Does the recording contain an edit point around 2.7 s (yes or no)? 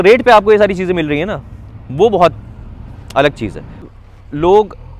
no